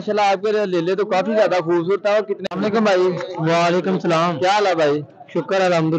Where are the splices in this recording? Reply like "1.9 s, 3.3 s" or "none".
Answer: 2.4 s